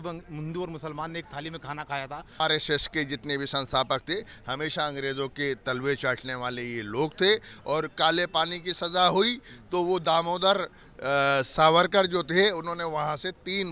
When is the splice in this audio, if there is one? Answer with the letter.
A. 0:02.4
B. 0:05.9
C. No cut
A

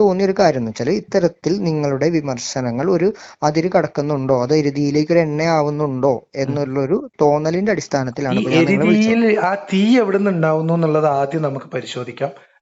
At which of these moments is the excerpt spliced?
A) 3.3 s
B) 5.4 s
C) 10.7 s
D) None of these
D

